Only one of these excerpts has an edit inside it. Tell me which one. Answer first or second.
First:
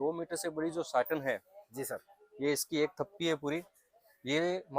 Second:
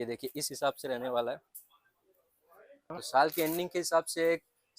second